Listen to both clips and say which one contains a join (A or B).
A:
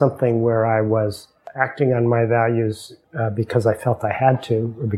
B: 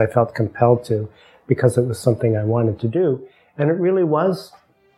A